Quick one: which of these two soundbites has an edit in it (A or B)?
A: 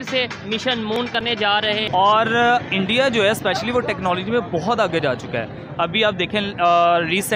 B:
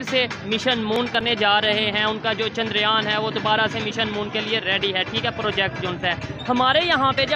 A